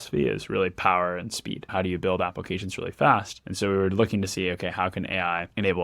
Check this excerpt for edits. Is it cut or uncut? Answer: cut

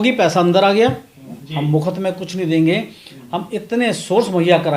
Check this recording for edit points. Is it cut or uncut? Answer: cut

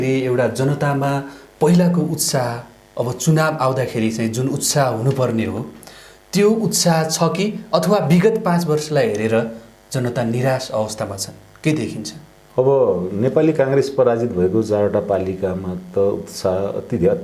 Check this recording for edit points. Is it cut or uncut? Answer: uncut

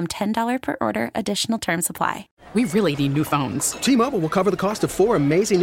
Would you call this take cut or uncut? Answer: cut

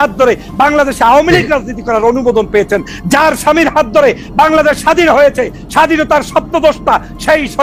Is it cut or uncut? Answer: uncut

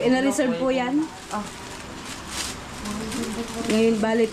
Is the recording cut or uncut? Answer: uncut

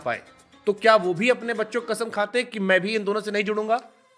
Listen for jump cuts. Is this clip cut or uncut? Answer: uncut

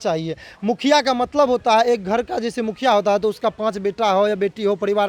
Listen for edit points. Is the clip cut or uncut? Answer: uncut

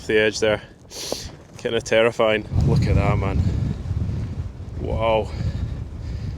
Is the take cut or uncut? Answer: cut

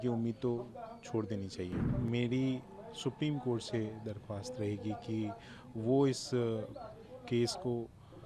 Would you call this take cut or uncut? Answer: cut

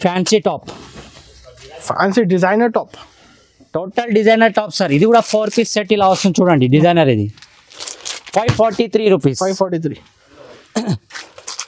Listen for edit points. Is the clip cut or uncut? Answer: uncut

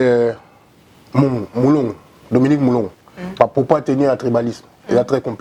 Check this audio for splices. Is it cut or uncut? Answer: uncut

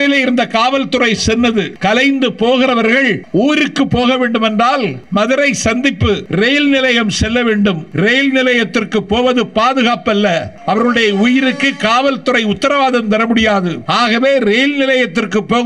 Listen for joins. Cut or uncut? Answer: cut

